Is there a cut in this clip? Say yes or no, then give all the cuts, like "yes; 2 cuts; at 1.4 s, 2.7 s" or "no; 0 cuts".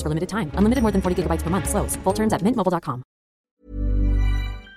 yes; 1 cut; at 3.5 s